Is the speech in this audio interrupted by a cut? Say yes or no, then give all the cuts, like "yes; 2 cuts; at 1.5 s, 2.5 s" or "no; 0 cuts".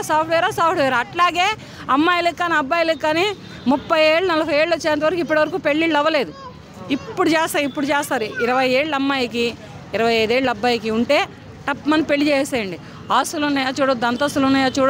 no; 0 cuts